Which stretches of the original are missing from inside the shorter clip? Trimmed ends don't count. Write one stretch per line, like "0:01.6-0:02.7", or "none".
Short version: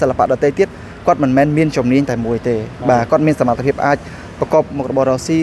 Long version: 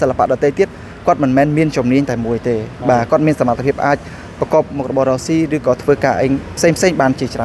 none